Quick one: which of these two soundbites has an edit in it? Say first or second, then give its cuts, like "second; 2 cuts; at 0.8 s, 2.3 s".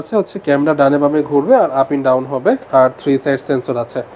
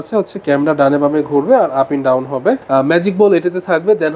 second; 1 cut; at 2.6 s